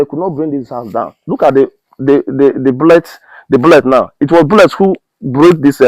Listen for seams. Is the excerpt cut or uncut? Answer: uncut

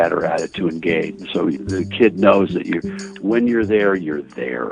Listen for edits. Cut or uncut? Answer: uncut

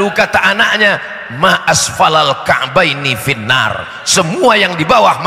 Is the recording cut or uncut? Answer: uncut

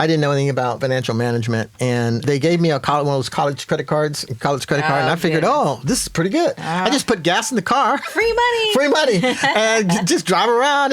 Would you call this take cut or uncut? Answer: cut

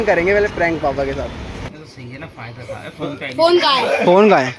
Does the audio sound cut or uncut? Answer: cut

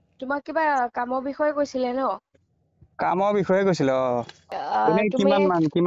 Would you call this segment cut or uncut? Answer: cut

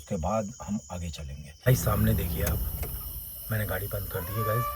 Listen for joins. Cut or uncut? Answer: cut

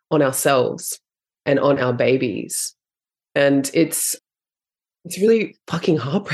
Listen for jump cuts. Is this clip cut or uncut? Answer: cut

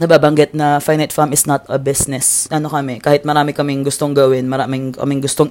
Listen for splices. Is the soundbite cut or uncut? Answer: cut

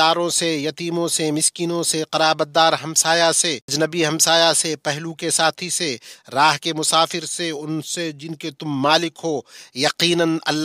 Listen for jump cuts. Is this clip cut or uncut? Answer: cut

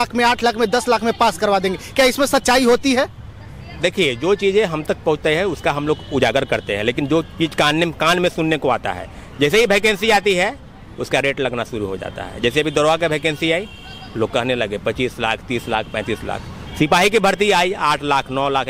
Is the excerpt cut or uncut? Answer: uncut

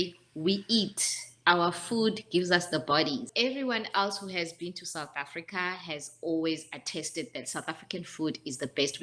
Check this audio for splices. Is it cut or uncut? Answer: cut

